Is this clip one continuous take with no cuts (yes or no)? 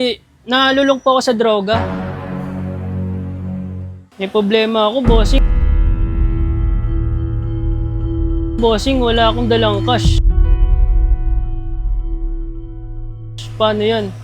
no